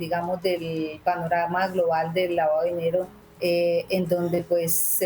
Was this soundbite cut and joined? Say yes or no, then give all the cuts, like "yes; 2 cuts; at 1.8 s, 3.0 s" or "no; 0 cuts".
yes; 1 cut; at 3.2 s